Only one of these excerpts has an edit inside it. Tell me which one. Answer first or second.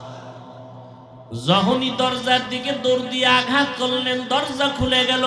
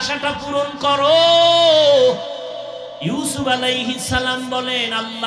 first